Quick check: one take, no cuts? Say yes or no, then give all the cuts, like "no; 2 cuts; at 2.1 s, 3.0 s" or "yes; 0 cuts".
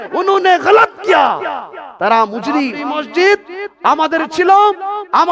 no; 1 cut; at 2.8 s